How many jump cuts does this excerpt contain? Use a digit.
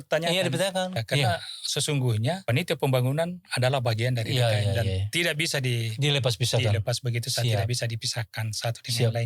2